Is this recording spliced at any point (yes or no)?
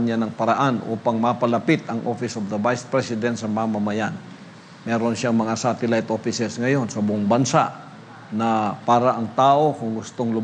no